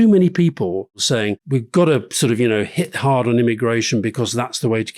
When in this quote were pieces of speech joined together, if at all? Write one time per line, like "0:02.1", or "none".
0:01.1